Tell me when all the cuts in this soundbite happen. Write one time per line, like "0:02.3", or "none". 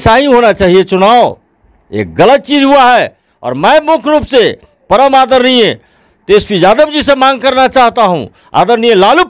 none